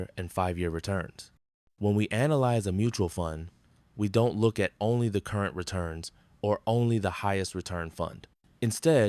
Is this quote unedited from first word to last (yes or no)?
yes